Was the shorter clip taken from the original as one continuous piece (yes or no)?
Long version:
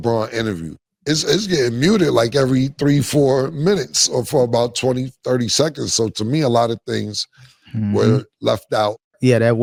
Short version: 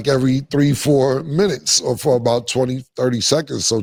yes